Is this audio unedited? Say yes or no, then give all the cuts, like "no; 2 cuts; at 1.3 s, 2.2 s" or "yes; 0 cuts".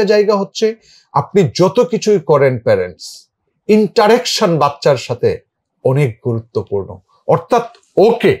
yes; 0 cuts